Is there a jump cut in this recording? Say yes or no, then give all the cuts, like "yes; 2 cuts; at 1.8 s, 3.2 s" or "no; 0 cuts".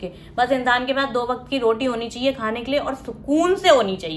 no; 0 cuts